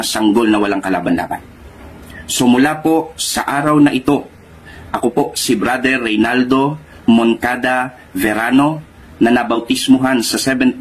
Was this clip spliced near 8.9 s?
yes; 1 cut; at 8.9 s

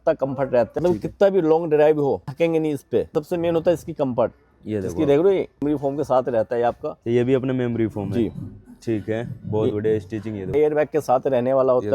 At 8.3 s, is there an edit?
no; 5 cuts; at 0.8 s, 2.3 s, 3.1 s, 5.6 s, 10.5 s

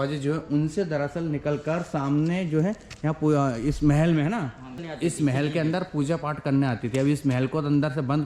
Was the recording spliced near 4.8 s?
yes; 1 cut; at 4.8 s

